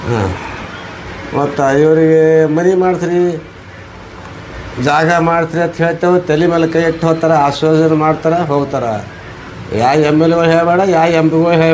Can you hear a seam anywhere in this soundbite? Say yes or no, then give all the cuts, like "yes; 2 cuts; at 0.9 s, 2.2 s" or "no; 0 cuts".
no; 0 cuts